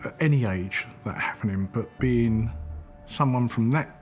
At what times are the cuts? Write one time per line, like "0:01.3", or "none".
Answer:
0:01.7